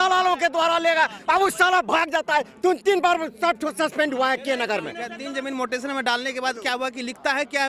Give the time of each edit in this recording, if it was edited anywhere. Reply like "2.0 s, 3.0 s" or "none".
5.2 s